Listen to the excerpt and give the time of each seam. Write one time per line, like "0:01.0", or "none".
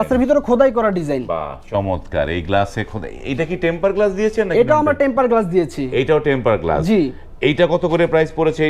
none